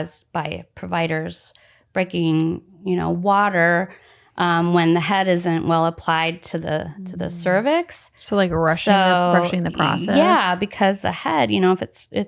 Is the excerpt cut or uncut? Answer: uncut